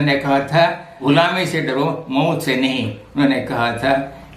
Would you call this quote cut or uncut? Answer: cut